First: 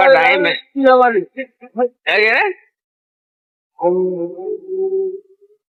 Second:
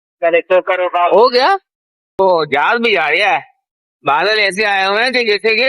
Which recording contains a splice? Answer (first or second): second